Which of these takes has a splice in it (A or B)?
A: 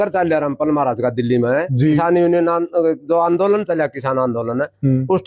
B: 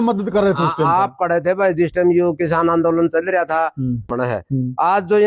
B